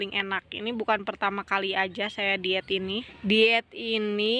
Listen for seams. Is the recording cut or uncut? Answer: cut